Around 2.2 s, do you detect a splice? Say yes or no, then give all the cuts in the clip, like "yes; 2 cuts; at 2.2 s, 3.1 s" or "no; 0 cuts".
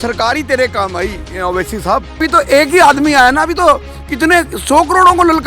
yes; 1 cut; at 2.2 s